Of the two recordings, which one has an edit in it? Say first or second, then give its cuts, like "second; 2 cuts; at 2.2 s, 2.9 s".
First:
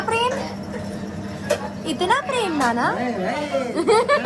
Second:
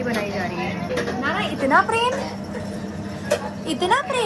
second; 1 cut; at 0.9 s